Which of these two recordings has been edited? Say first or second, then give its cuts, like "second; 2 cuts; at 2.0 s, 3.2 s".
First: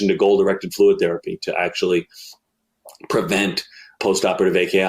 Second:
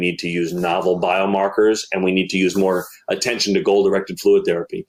first; 1 cut; at 4.0 s